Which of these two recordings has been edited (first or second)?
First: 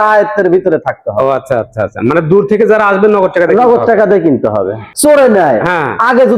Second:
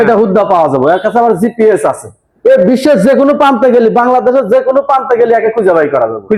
first